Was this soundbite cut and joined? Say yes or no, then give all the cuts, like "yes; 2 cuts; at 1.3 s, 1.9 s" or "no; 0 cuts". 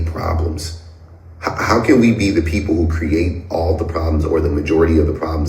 yes; 1 cut; at 2.3 s